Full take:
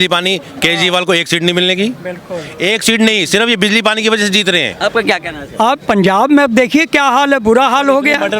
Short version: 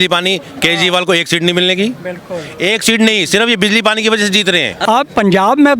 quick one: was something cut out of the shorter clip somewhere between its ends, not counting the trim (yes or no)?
yes